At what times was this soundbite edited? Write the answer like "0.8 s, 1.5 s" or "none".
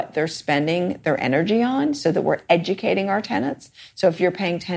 none